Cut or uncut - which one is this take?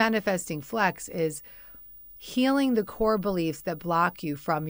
uncut